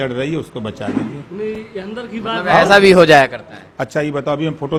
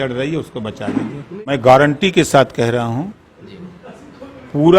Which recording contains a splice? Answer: second; 1 cut; at 1.4 s

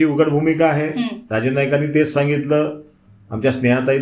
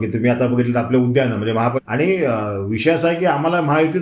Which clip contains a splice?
second; 1 cut; at 1.8 s

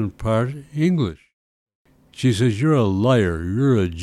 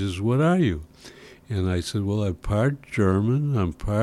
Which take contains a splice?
first; 1 cut; at 1.5 s

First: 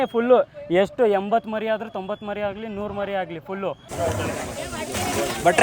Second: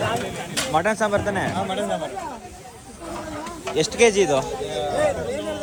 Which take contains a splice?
first; 1 cut; at 3.9 s

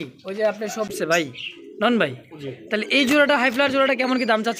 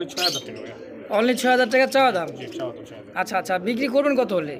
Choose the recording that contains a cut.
first; 1 cut; at 0.9 s

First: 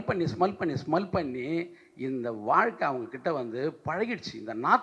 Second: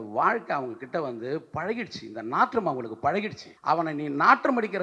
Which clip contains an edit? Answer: second; 1 cut; at 3.4 s

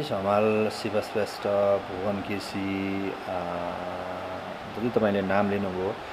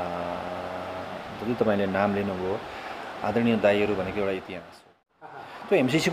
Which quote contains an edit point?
second; 1 cut; at 5.0 s

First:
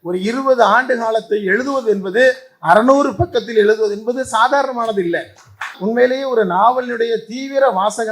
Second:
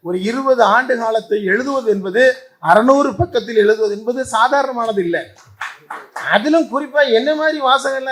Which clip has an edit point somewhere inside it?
first; 1 cut; at 5.8 s

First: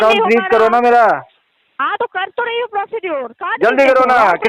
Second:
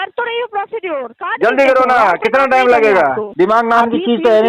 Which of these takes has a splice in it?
second; 1 cut; at 3.2 s

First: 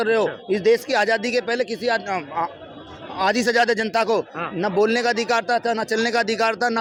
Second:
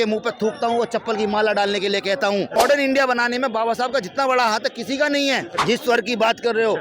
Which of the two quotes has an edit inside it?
second; 2 cuts; at 2.6 s, 5.5 s

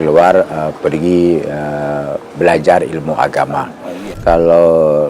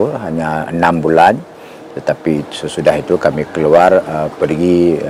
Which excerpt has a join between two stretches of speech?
first; 1 cut; at 4.2 s

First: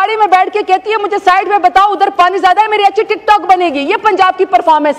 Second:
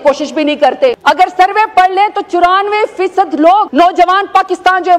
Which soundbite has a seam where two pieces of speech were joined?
second; 2 cuts; at 1.0 s, 3.7 s

